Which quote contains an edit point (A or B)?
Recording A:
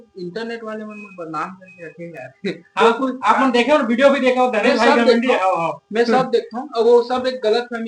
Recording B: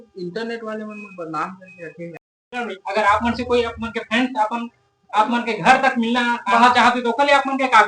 B